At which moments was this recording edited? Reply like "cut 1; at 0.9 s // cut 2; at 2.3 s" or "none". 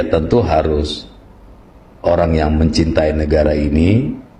none